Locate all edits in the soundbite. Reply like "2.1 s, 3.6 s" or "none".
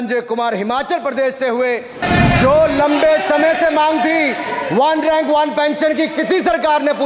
2.0 s